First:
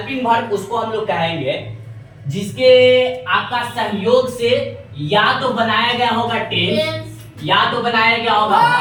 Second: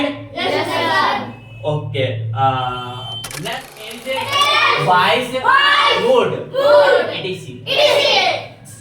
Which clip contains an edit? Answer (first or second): second